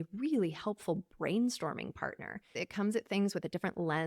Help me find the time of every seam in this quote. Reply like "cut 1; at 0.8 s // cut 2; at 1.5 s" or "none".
cut 1; at 2.6 s